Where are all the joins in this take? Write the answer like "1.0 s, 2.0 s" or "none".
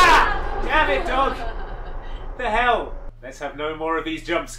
none